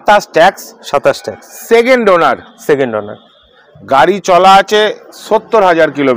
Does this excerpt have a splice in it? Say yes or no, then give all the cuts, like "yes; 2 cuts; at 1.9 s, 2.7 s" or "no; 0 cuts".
no; 0 cuts